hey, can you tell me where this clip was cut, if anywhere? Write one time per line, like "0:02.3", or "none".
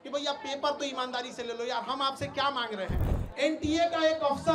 0:03.1